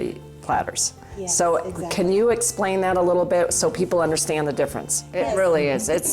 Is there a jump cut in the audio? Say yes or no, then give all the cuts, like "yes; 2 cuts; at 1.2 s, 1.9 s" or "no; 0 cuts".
yes; 1 cut; at 5.0 s